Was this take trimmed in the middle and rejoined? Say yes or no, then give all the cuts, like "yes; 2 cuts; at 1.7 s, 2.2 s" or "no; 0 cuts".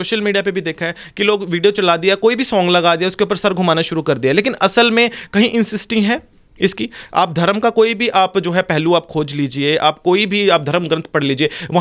no; 0 cuts